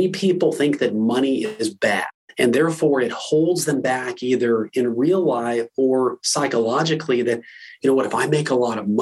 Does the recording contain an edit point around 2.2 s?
yes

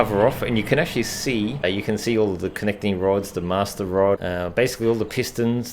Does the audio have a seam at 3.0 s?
no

